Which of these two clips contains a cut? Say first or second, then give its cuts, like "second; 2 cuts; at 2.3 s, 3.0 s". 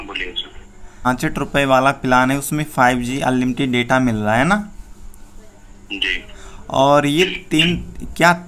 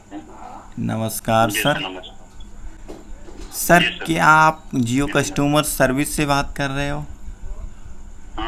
first; 1 cut; at 1.0 s